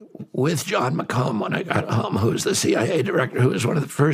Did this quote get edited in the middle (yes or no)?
no